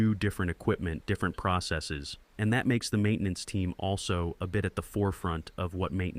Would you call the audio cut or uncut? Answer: uncut